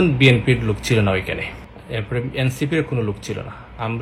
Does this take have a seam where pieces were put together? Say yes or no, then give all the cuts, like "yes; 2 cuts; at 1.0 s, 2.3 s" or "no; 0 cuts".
no; 0 cuts